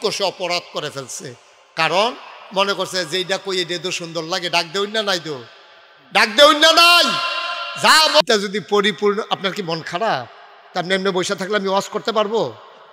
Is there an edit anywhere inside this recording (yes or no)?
yes